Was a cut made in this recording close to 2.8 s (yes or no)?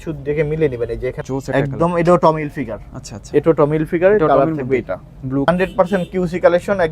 no